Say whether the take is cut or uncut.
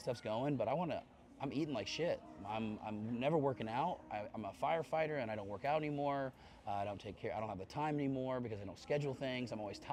uncut